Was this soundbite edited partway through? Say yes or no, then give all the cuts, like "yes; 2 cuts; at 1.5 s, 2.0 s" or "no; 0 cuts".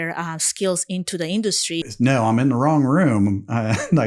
yes; 1 cut; at 1.9 s